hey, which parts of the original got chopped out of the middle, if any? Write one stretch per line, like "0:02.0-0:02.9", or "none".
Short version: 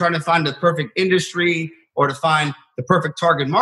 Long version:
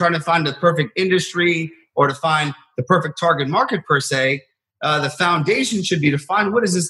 none